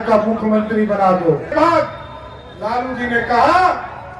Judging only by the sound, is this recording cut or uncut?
cut